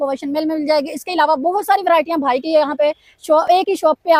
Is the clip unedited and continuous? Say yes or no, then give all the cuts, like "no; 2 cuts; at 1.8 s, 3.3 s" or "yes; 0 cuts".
yes; 0 cuts